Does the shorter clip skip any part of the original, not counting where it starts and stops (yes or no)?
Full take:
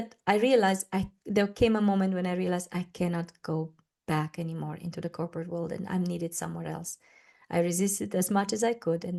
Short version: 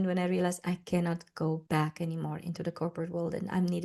yes